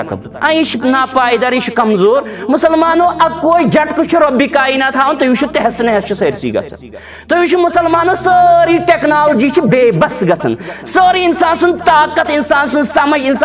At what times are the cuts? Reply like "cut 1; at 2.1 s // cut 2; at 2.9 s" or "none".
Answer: none